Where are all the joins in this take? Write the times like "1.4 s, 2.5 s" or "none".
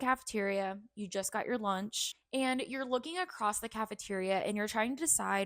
2.2 s